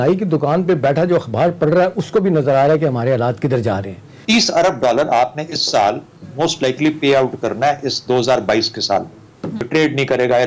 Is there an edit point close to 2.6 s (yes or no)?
no